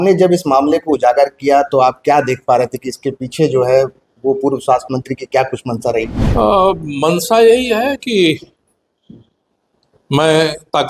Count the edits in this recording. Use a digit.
1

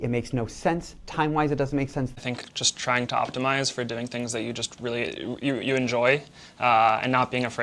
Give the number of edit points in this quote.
1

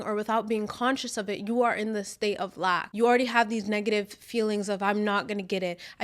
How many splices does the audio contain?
1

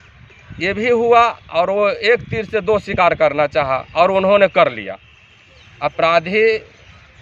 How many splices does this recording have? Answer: 0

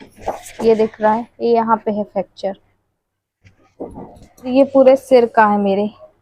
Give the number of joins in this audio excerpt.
1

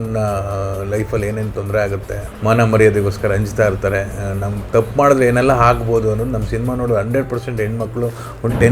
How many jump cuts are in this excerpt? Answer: 1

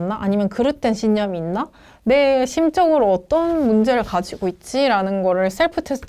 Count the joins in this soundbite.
0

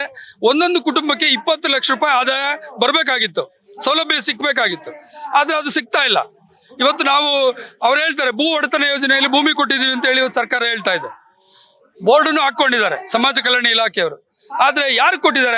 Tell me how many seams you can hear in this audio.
0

